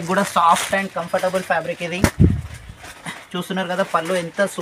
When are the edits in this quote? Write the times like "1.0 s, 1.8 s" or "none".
none